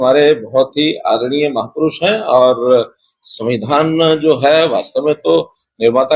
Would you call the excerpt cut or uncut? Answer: uncut